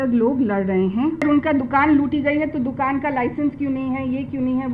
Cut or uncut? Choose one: cut